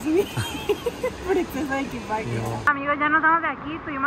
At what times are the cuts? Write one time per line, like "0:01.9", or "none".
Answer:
0:02.7

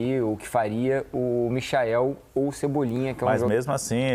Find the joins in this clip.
0:03.0

